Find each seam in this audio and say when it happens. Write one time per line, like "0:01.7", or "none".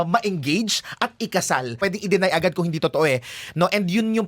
0:01.8